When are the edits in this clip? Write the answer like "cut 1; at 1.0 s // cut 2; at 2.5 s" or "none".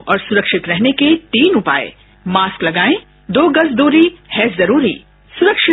none